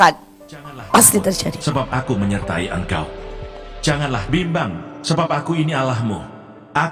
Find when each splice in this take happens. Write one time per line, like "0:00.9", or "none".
0:01.6